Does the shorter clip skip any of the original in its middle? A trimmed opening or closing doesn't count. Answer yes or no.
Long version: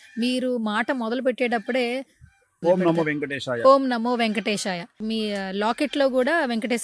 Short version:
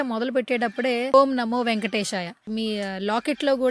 yes